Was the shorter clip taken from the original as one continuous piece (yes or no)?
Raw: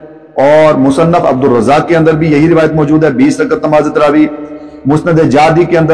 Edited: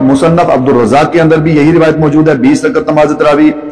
yes